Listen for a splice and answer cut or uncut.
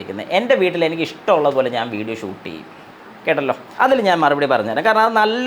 cut